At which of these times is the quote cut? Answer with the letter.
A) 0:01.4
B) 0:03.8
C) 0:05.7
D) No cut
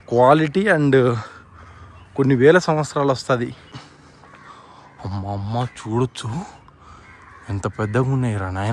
B